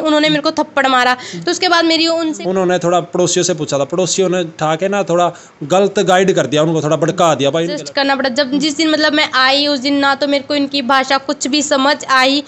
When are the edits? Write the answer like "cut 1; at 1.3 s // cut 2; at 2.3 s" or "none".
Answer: cut 1; at 2.3 s // cut 2; at 7.8 s